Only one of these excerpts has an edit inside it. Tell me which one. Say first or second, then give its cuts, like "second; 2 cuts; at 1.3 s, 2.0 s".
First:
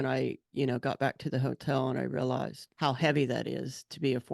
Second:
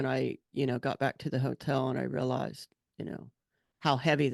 first; 1 cut; at 2.6 s